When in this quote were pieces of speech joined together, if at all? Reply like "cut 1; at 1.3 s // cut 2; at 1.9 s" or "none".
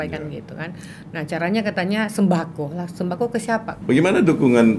cut 1; at 3.7 s